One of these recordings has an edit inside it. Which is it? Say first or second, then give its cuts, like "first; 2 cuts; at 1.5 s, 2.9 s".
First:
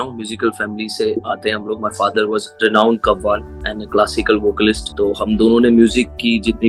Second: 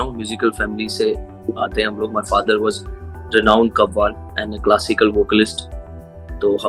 first; 3 cuts; at 1.1 s, 2.5 s, 4.9 s